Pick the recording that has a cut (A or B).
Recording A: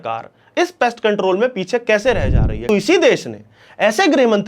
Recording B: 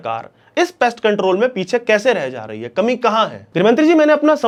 A